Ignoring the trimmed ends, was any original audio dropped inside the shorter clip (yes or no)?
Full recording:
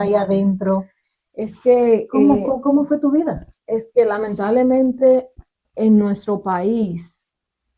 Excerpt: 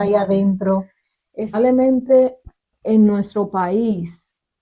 yes